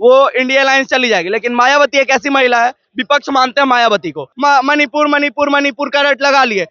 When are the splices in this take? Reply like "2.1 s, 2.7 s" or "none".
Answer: 4.3 s